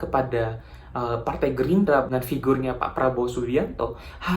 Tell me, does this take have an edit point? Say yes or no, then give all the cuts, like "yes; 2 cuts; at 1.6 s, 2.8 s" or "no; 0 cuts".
yes; 1 cut; at 2.1 s